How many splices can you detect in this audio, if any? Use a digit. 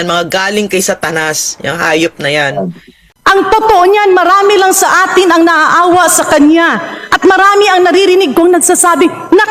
1